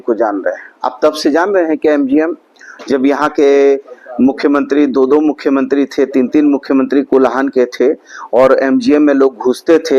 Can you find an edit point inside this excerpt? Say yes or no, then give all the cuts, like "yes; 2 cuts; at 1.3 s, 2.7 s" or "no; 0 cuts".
no; 0 cuts